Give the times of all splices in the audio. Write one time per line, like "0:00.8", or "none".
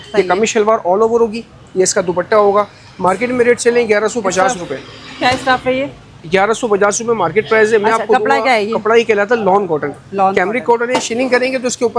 none